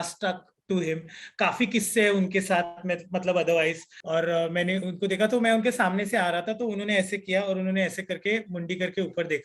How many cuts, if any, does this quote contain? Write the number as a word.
one